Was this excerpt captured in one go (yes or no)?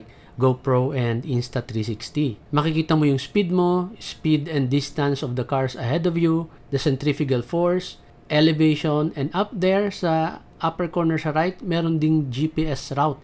no